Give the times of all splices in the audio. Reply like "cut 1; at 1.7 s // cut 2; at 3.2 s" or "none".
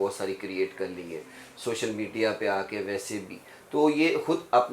none

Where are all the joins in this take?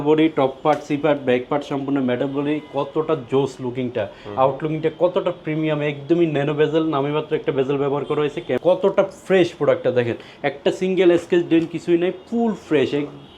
cut 1; at 8.6 s

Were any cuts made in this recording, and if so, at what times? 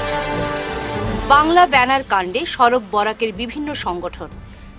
cut 1; at 1.2 s

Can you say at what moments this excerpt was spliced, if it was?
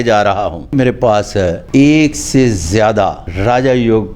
cut 1; at 0.7 s // cut 2; at 1.6 s // cut 3; at 3.3 s

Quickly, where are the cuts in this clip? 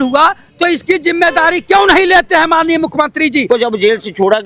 cut 1; at 3.5 s

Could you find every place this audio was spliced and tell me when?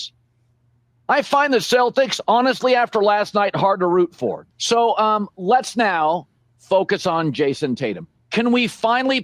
cut 1; at 4.5 s

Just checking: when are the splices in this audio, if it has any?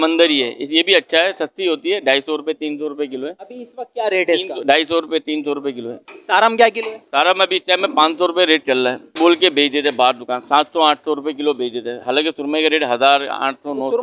none

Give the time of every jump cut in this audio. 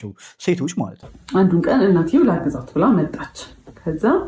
cut 1; at 1.0 s

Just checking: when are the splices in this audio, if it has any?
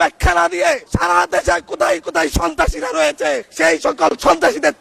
cut 1; at 0.9 s // cut 2; at 3.5 s

